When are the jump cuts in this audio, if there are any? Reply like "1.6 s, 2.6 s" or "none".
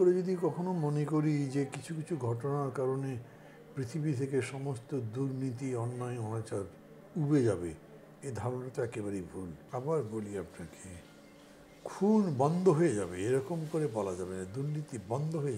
9.6 s